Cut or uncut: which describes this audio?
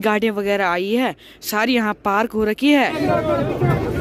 cut